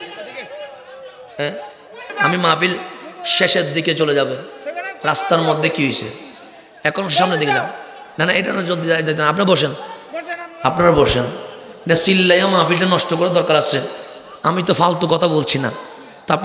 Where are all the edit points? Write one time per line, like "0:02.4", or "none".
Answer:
0:02.1